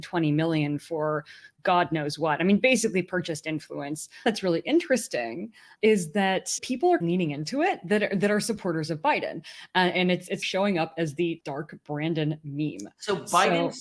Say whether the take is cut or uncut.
cut